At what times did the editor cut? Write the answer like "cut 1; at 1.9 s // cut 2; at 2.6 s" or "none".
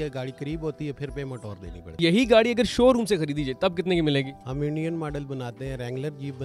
cut 1; at 2.0 s // cut 2; at 4.4 s

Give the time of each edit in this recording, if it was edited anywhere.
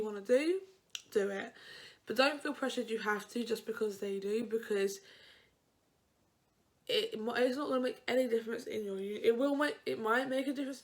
none

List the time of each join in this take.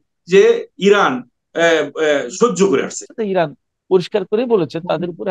cut 1; at 3.0 s

